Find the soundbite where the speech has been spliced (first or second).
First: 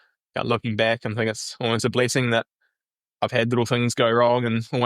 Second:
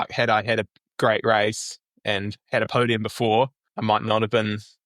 second